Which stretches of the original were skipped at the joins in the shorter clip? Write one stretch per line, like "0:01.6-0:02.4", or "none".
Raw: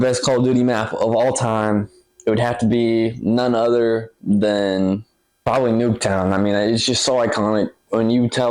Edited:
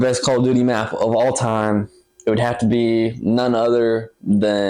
none